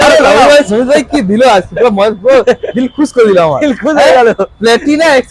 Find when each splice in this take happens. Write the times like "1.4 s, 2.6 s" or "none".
none